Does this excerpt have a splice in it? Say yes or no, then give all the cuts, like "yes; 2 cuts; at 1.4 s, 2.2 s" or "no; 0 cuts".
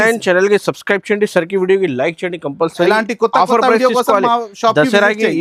no; 0 cuts